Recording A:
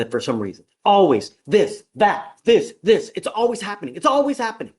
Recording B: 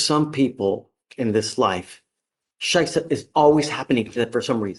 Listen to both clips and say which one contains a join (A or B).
A